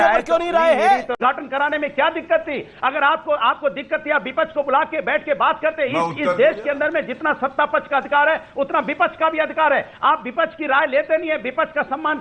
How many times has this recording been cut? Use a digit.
1